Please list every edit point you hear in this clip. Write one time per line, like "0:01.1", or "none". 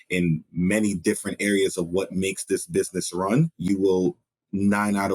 0:03.6